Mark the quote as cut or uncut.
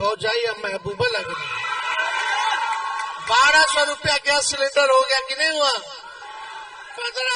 uncut